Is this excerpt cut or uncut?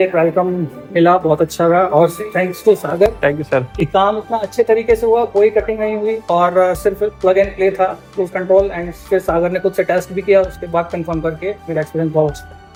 uncut